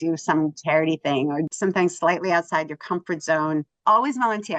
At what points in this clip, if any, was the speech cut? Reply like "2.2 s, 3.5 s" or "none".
1.5 s, 3.7 s